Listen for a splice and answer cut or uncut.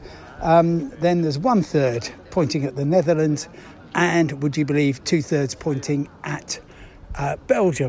uncut